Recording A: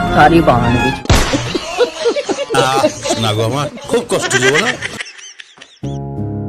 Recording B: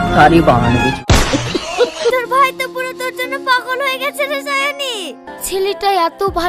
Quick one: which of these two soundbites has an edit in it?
B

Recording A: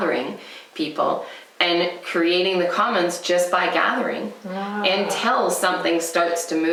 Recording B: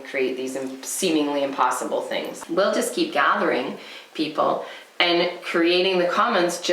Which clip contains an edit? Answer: B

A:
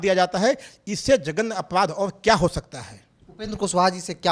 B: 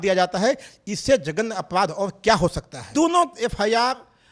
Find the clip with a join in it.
B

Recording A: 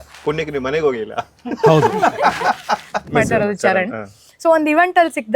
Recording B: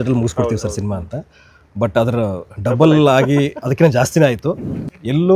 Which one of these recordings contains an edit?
A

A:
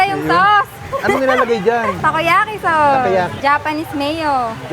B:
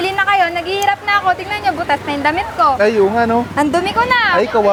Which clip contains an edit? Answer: A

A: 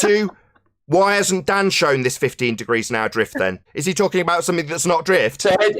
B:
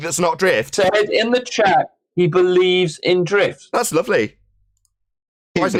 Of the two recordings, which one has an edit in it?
A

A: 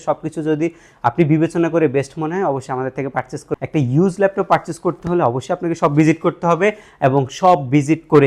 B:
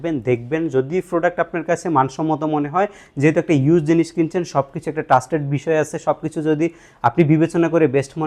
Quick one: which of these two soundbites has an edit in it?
A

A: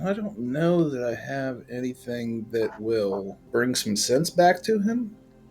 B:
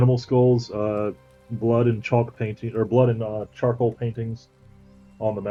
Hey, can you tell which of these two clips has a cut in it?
A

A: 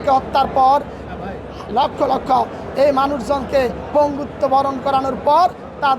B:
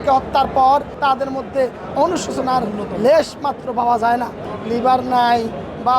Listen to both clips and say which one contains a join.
B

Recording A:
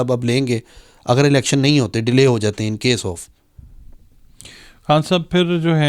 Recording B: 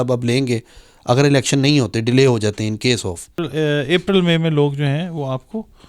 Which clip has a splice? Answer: B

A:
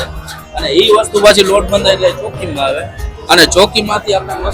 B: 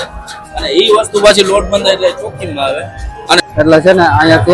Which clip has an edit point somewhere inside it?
B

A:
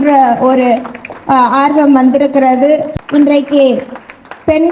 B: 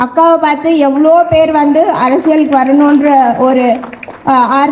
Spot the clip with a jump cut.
A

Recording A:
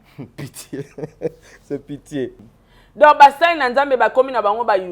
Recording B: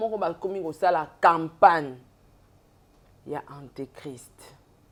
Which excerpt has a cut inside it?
A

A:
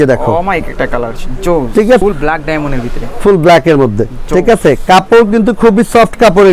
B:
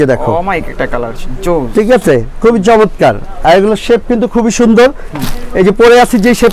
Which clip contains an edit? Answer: A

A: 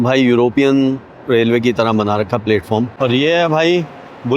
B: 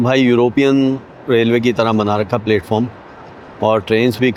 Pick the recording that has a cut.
A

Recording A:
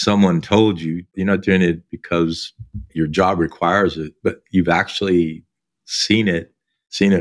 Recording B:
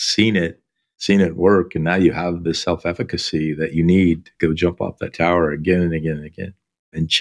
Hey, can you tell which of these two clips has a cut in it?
A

